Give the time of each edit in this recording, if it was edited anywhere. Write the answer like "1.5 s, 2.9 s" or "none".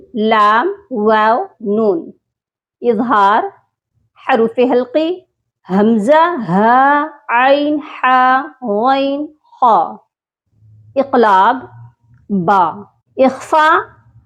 none